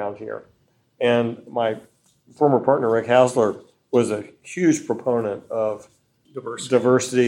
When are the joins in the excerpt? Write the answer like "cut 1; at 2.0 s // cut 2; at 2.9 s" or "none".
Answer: cut 1; at 6.2 s